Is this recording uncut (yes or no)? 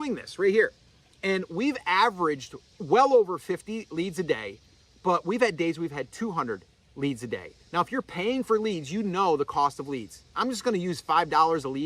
yes